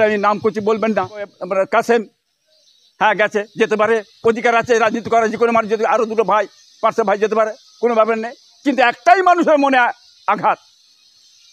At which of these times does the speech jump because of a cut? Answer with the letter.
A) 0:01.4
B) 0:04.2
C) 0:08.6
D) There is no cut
A